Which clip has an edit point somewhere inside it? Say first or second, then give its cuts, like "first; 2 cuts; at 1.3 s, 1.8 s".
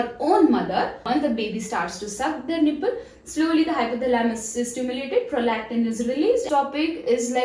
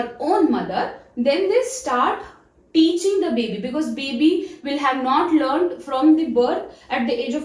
first; 2 cuts; at 1.0 s, 6.5 s